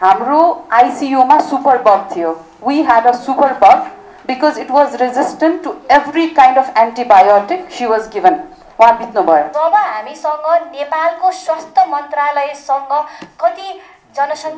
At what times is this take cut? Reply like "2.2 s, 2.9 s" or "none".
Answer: 9.5 s